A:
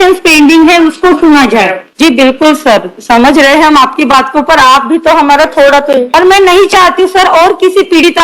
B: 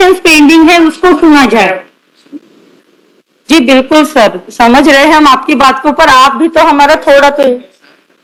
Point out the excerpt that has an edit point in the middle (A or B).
A